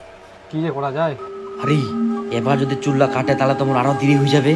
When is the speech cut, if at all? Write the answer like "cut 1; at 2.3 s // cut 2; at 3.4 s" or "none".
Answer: cut 1; at 1.3 s